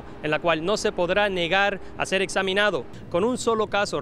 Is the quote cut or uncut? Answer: cut